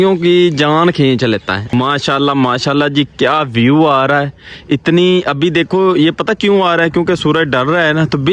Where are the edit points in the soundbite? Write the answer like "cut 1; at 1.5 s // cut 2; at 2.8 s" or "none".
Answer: cut 1; at 1.7 s